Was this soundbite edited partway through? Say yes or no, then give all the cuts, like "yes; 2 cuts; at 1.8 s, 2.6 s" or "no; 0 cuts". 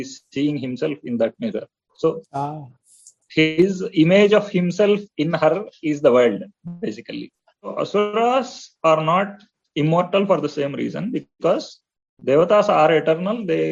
yes; 1 cut; at 7.7 s